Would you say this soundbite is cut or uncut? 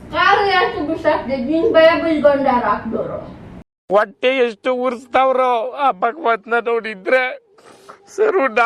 uncut